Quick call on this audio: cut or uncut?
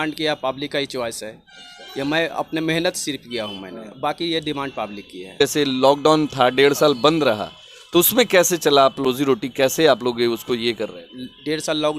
cut